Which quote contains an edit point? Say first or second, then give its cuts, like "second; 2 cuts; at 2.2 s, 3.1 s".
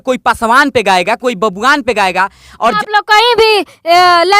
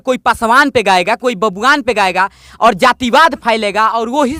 first; 1 cut; at 2.8 s